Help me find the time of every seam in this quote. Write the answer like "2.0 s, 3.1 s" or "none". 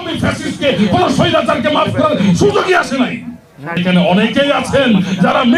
3.8 s